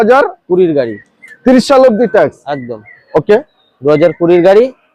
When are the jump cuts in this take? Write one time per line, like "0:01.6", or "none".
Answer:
none